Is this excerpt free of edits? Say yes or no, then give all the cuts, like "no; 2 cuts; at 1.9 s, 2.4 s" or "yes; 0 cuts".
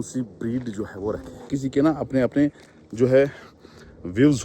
no; 1 cut; at 1.5 s